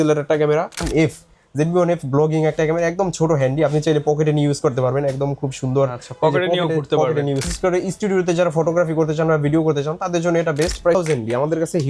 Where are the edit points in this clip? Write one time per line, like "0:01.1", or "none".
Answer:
0:00.9
0:07.4
0:10.9